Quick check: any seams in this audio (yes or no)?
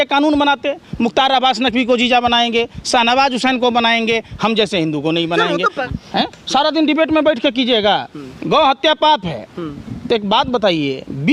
yes